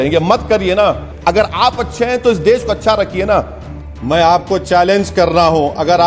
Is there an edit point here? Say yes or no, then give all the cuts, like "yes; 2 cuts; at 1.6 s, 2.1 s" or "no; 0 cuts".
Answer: yes; 2 cuts; at 1.1 s, 3.9 s